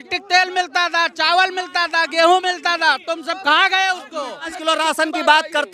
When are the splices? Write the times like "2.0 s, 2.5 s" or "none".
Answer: 4.5 s